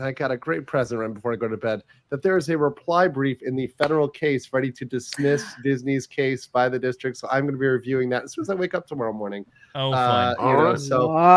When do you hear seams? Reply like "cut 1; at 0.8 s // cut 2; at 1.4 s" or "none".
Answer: none